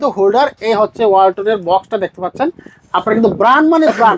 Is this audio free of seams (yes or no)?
yes